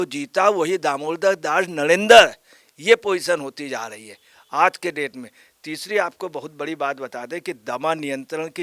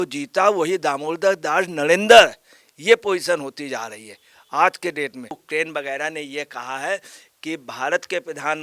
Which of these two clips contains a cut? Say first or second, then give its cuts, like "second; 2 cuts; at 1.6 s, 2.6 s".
second; 1 cut; at 5.4 s